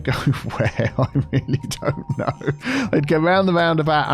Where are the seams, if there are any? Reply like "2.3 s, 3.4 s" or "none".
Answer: none